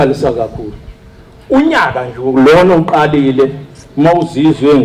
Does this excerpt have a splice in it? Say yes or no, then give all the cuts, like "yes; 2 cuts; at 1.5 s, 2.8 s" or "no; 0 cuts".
no; 0 cuts